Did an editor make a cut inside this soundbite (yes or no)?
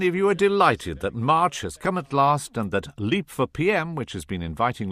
no